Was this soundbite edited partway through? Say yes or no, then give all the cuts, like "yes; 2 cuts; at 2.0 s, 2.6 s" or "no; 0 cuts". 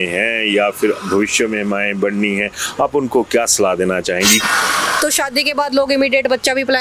yes; 1 cut; at 4.4 s